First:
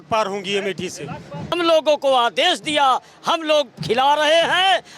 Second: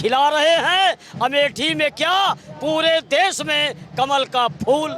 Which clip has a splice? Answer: first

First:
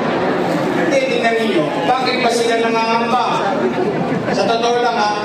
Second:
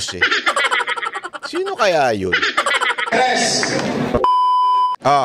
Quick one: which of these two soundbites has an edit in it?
second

